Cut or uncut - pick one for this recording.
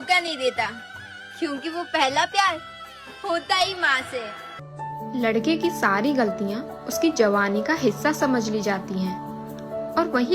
cut